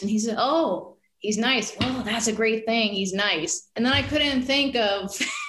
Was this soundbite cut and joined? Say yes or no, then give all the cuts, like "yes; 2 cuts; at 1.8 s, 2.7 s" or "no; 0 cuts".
yes; 1 cut; at 3.7 s